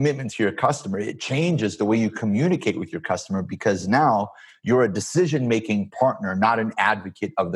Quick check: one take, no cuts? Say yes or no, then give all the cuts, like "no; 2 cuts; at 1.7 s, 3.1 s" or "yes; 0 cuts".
yes; 0 cuts